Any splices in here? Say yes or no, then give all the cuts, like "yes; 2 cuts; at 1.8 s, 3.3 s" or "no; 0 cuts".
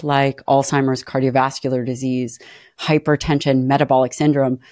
no; 0 cuts